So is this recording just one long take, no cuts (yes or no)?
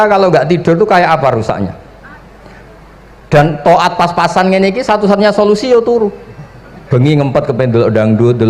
yes